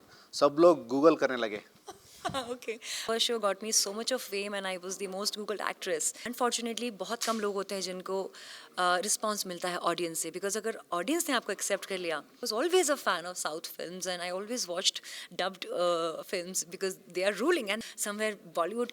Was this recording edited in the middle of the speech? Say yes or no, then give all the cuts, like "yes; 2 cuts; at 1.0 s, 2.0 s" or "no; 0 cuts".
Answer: yes; 4 cuts; at 3.0 s, 6.1 s, 12.4 s, 17.8 s